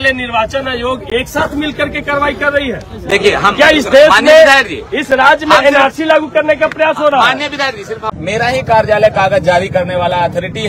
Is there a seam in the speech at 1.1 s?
no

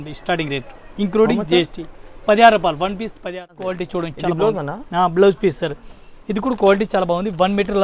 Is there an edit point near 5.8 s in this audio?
no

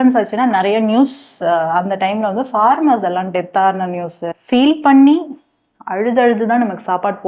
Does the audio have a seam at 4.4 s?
yes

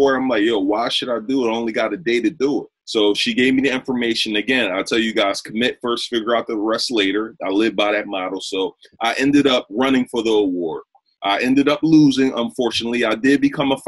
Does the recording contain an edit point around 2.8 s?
no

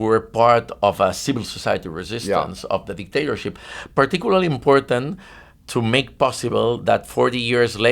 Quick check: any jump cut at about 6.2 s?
no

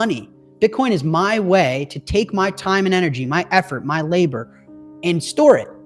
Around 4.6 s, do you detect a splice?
no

